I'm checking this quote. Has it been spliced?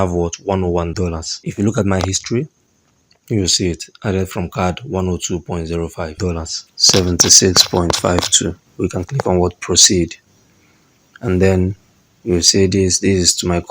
yes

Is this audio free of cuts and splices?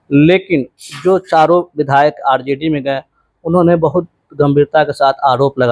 yes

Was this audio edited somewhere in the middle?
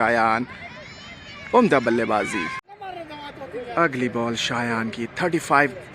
yes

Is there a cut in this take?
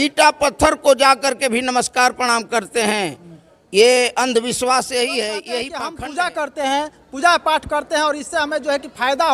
yes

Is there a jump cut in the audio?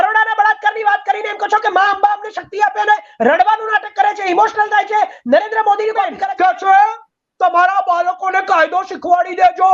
yes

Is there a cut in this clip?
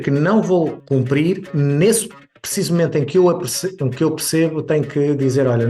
yes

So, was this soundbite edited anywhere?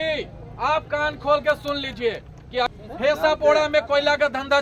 yes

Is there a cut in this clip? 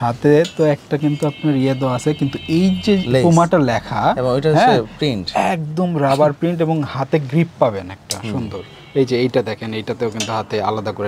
no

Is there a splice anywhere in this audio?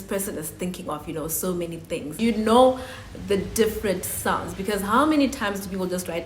yes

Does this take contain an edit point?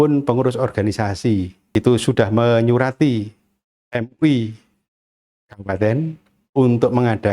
yes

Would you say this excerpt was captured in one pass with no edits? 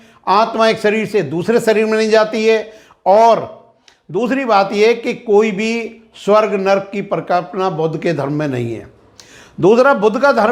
yes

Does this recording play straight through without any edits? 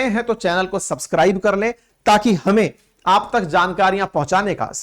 no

